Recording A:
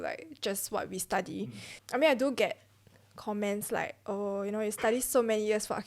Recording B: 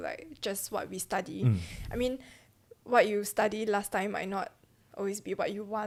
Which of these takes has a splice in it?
A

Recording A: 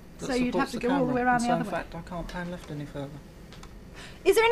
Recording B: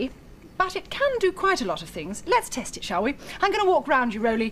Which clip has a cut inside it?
A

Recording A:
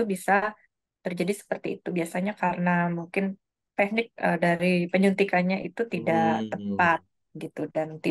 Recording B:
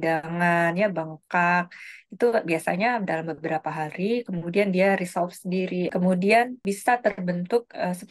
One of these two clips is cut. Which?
B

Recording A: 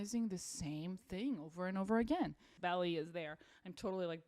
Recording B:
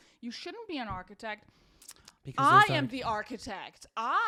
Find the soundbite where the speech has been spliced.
A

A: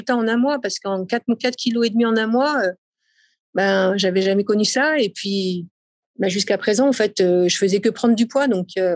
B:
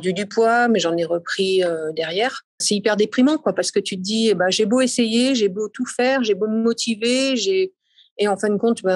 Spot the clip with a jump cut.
B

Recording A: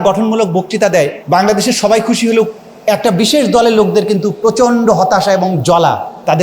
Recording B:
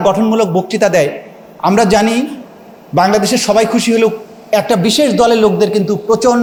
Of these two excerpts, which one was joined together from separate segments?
A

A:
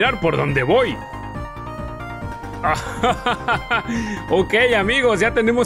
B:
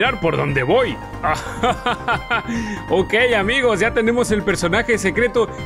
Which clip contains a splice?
B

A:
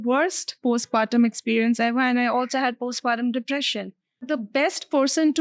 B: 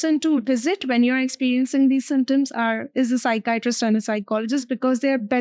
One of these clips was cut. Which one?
A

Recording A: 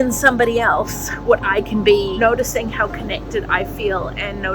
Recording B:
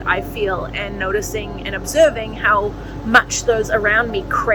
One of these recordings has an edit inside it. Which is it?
A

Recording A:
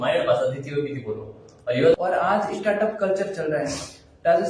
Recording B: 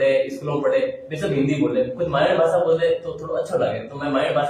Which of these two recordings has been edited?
A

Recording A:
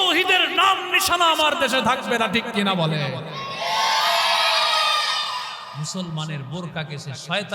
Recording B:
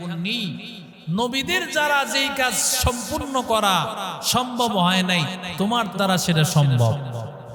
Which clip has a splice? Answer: A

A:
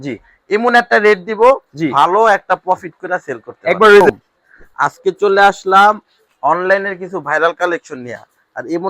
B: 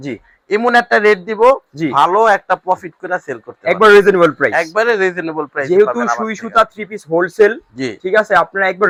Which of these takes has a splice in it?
A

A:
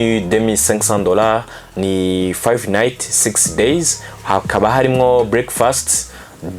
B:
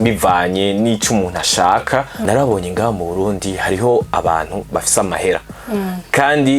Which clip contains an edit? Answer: B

